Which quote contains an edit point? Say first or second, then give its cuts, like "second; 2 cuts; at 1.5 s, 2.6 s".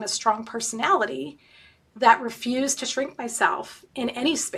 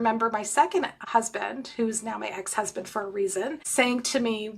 second; 2 cuts; at 1.0 s, 3.6 s